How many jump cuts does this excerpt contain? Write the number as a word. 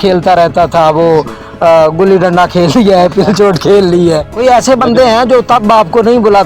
one